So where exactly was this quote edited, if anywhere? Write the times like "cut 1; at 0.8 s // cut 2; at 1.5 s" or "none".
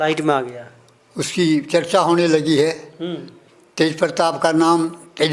none